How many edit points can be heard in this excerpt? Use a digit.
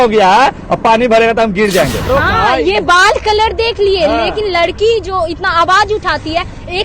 1